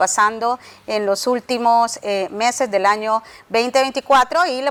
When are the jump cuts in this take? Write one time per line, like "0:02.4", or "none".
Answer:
none

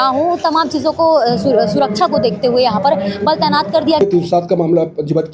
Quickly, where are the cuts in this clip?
0:04.0

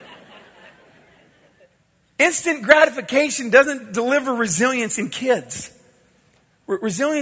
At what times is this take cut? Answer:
0:01.6

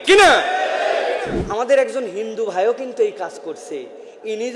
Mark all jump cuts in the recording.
0:01.7

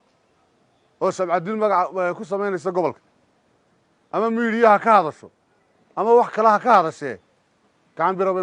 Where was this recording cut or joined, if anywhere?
none

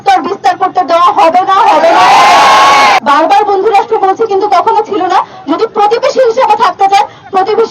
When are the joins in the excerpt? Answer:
0:03.0

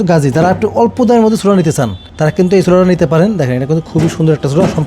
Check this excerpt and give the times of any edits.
none

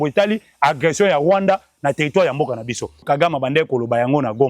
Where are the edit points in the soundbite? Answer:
0:03.0

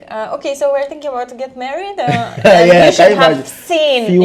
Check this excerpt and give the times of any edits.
none

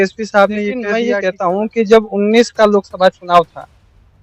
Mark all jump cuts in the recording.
0:00.9

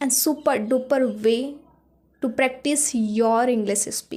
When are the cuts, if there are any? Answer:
none

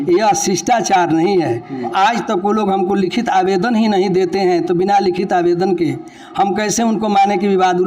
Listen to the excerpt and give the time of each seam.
0:01.9

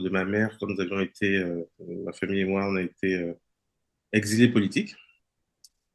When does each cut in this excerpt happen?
none

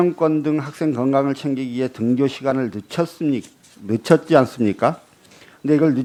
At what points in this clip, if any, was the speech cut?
none

